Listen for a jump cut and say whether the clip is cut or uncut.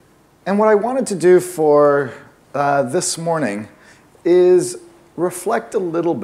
cut